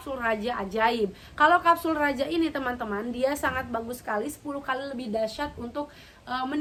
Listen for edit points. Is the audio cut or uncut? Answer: uncut